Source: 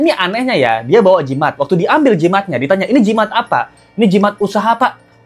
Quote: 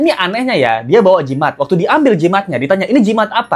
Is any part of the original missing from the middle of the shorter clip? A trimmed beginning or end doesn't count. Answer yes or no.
no